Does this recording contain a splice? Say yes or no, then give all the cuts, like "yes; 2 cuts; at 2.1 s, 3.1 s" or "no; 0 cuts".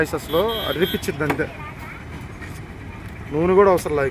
no; 0 cuts